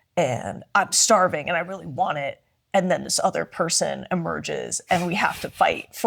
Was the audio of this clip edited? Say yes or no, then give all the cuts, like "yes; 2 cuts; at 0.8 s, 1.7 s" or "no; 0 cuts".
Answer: no; 0 cuts